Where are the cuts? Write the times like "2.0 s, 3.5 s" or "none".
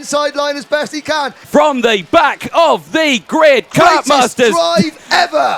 1.3 s